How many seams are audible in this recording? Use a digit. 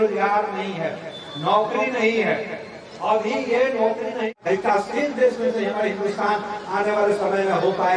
0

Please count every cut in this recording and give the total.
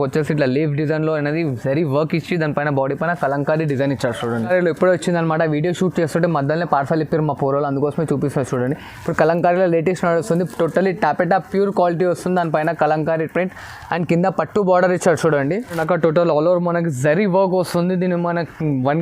2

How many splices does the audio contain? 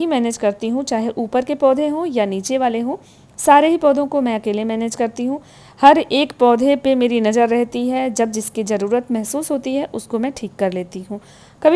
0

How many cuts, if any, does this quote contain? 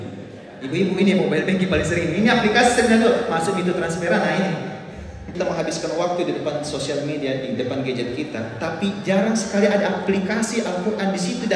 1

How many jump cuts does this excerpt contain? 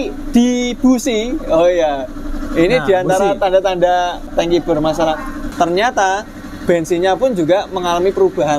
2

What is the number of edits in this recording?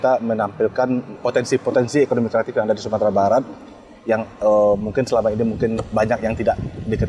1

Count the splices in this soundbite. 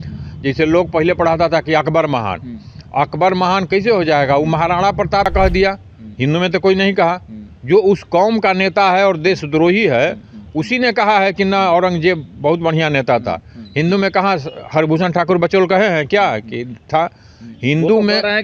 1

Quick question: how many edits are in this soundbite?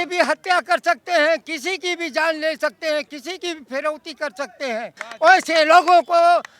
1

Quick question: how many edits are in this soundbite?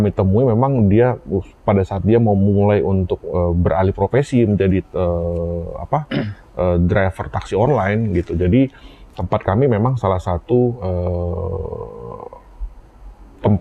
0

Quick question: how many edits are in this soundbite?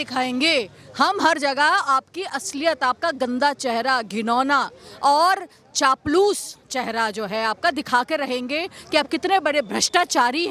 0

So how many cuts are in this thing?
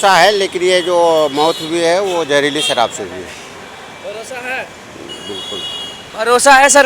0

